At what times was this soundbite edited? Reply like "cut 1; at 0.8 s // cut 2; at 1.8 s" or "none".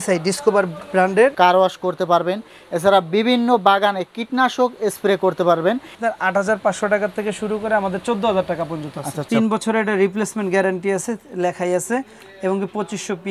cut 1; at 1.3 s // cut 2; at 5.9 s // cut 3; at 9.2 s

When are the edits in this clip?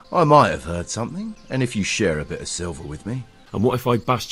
cut 1; at 1.3 s // cut 2; at 3.5 s

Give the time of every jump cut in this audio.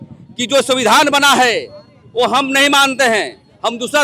none

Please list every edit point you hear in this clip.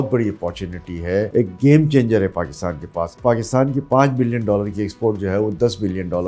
cut 1; at 1.3 s // cut 2; at 3.2 s

